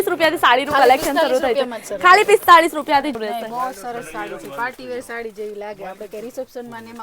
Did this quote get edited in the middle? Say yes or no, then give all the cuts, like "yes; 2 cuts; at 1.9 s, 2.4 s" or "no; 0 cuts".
yes; 1 cut; at 3.1 s